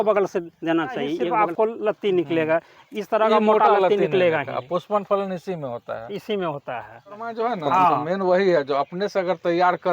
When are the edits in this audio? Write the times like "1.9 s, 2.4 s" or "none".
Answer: 1.2 s, 7.3 s